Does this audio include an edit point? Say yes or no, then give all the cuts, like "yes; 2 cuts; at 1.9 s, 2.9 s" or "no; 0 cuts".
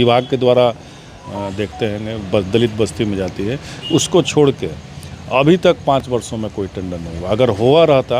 yes; 1 cut; at 1.2 s